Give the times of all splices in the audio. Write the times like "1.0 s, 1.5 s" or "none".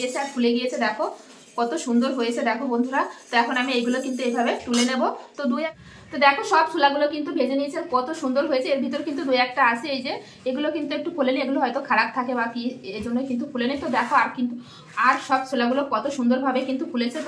5.7 s